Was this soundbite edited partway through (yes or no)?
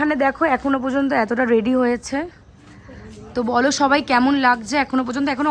no